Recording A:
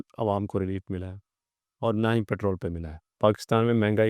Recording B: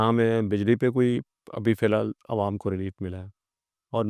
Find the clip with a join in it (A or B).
A